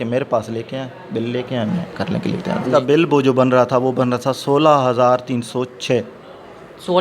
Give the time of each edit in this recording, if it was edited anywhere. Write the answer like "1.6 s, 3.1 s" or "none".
2.6 s

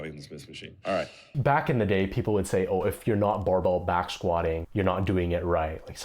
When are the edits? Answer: 1.2 s, 4.7 s

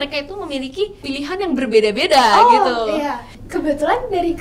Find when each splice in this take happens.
1.0 s, 3.4 s

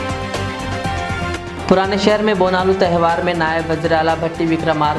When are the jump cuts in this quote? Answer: 1.3 s

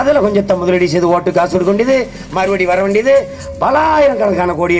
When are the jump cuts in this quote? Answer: none

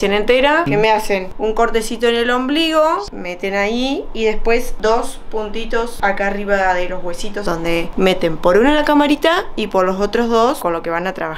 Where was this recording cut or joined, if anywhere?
0.8 s, 3.1 s, 4.7 s, 5.9 s, 7.5 s, 10.6 s

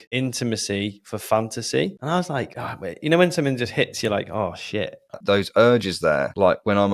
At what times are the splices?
5.2 s

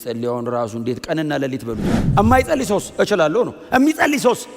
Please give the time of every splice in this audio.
2.0 s

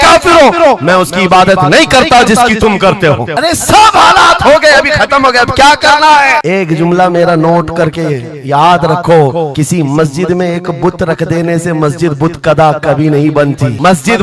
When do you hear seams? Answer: none

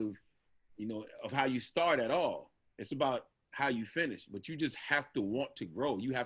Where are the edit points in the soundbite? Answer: none

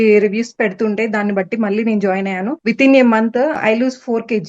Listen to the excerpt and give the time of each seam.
2.6 s, 3.6 s

